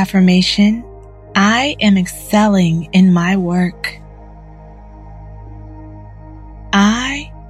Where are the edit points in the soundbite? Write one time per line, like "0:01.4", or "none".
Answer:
none